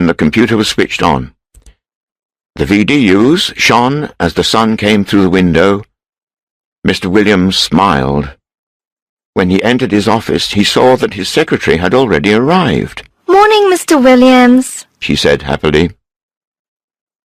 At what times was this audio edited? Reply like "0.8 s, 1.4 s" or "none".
12.4 s